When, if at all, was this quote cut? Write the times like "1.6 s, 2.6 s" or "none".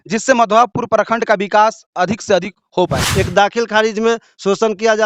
3.0 s